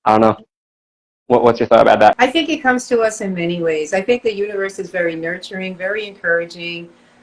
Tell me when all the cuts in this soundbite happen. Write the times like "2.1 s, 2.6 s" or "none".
2.2 s

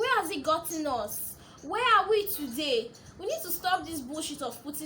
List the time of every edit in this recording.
none

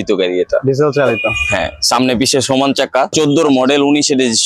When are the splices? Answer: 3.1 s

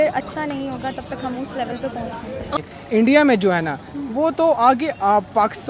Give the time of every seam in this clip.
2.7 s

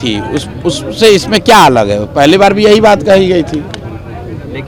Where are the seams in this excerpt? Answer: none

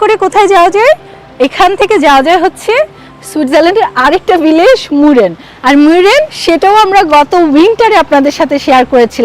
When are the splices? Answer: none

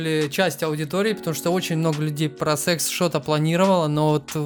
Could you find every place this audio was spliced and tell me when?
none

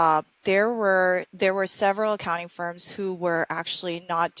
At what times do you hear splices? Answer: 1.3 s

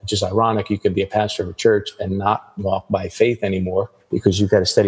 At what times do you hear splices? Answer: 4.0 s

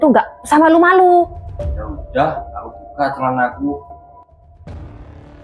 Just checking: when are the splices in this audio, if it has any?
1.7 s, 3.8 s

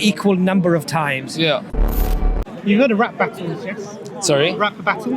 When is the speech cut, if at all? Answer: 2.0 s

